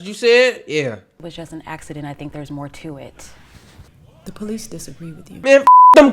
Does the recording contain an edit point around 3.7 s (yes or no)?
no